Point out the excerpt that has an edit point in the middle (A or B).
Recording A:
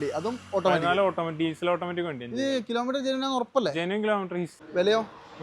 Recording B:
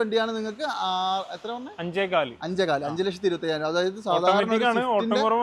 A